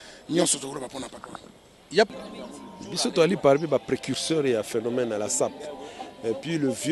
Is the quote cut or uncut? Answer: cut